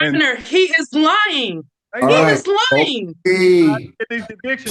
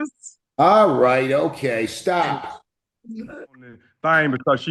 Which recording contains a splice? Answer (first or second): second